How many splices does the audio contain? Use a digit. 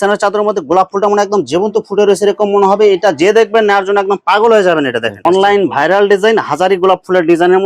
1